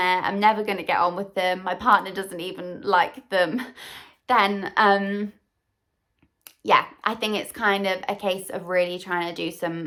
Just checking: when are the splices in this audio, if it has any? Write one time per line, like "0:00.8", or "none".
none